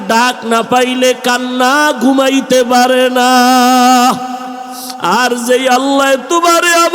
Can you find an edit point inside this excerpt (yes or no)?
no